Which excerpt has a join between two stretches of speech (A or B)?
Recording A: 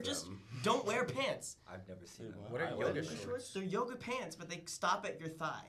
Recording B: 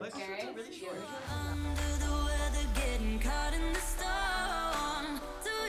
B